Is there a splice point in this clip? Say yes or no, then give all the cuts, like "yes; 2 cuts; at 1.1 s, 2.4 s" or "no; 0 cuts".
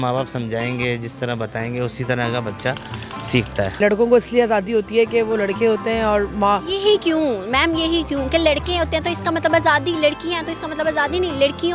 yes; 1 cut; at 3.8 s